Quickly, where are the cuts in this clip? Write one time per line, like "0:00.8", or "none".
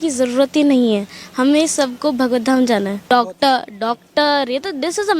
0:03.0